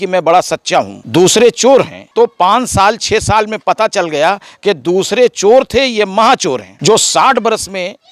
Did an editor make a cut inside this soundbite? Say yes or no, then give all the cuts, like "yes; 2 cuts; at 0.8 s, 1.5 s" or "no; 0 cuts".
yes; 3 cuts; at 1.0 s, 2.0 s, 6.7 s